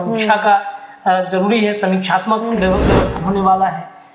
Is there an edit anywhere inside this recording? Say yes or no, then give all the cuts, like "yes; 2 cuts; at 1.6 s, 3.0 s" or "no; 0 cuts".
yes; 1 cut; at 3.1 s